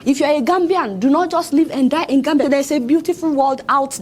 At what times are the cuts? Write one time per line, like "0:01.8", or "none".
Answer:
0:02.4